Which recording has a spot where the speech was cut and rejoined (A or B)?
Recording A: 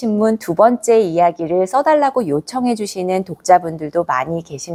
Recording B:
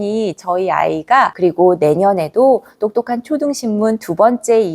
B